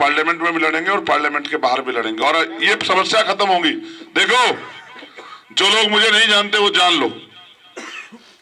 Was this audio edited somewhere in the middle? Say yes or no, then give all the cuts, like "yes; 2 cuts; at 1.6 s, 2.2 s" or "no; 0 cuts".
no; 0 cuts